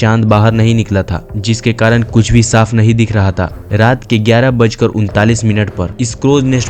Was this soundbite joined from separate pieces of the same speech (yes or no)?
yes